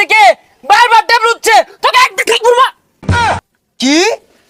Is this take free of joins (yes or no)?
yes